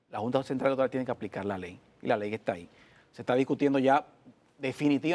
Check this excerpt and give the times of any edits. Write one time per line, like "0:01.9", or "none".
none